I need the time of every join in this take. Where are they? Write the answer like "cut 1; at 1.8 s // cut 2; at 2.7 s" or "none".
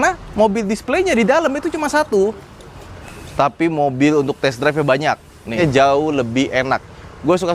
cut 1; at 5.5 s